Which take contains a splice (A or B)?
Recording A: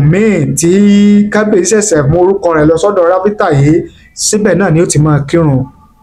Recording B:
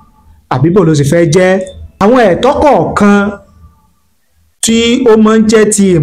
B